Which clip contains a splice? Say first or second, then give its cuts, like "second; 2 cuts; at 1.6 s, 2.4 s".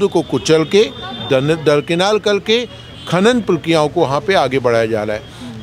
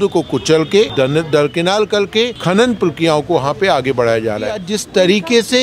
second; 3 cuts; at 0.9 s, 2.4 s, 4.7 s